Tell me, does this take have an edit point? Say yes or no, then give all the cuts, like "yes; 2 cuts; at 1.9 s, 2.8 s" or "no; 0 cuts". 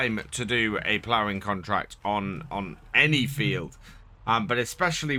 no; 0 cuts